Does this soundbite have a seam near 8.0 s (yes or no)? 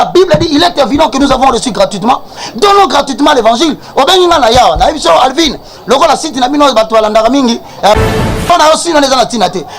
yes